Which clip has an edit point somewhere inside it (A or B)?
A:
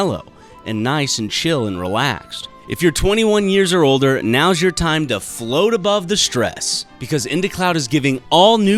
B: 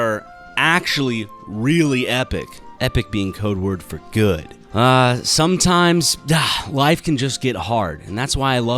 B